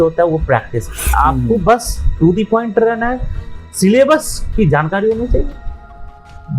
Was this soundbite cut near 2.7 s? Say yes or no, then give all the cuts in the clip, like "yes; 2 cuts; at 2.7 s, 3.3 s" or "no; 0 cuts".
no; 1 cut; at 1.1 s